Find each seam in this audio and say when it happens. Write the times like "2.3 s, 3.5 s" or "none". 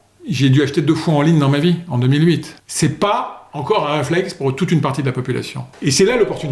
2.5 s, 5.6 s